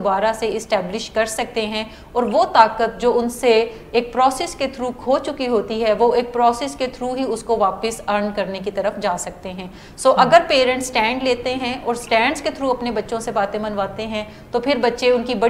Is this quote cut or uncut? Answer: uncut